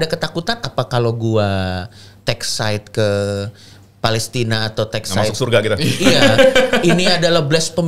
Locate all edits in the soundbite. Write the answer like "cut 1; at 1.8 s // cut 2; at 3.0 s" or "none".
none